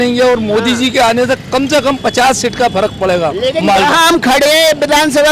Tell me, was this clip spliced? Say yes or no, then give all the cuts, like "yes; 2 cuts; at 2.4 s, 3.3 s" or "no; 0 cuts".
no; 0 cuts